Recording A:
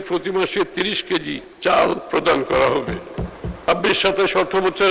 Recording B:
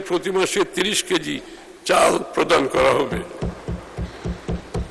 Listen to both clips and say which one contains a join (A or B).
A